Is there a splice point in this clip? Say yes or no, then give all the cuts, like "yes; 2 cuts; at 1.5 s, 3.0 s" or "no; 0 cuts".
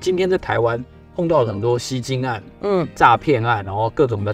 no; 0 cuts